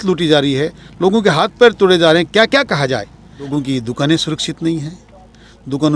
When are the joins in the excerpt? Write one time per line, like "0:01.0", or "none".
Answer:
0:03.5